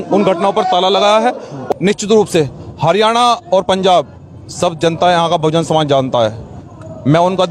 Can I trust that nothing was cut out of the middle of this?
no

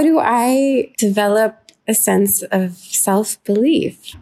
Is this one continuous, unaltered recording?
no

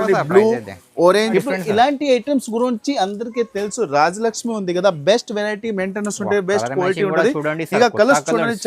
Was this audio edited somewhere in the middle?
yes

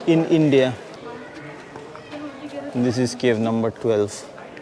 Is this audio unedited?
no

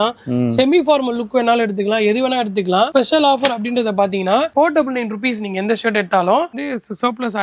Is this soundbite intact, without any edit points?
no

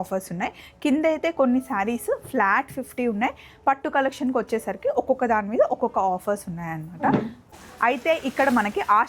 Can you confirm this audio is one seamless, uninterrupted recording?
no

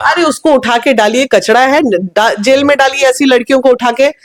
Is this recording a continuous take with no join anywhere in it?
yes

